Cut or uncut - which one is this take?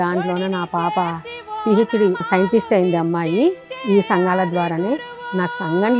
cut